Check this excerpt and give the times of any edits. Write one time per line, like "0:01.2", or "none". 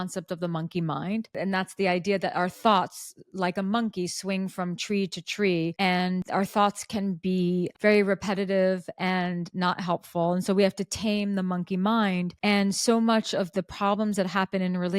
0:01.4